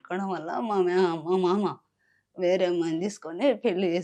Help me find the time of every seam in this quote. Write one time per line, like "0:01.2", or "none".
none